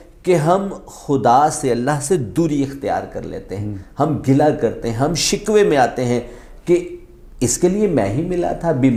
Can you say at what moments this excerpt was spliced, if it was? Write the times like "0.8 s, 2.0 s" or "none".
none